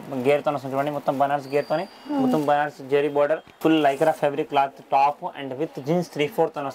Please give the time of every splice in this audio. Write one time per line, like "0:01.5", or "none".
0:03.5